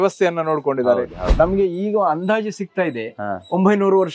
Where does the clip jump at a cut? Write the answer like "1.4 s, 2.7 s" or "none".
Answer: 1.2 s